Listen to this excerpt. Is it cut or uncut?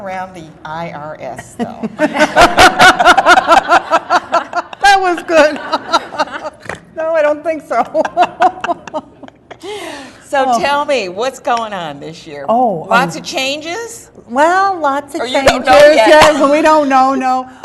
cut